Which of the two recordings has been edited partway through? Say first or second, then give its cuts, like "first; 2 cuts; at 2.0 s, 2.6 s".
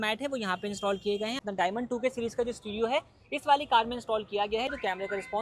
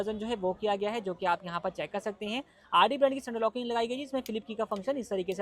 first; 2 cuts; at 1.4 s, 4.7 s